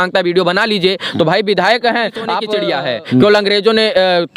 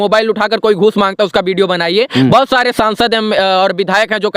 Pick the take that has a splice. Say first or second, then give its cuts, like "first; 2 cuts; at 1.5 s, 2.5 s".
first; 1 cut; at 2.5 s